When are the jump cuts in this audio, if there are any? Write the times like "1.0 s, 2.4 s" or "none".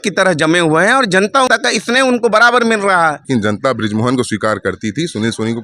1.5 s, 3.2 s